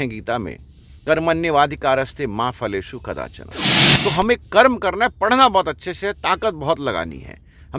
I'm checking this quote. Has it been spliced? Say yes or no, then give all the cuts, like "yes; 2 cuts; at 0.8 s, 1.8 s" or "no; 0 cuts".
no; 0 cuts